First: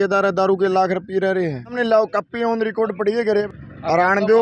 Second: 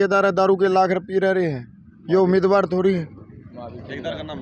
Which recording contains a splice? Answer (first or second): first